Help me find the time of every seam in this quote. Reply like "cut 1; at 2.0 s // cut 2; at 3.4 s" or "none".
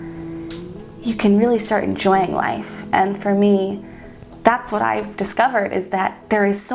none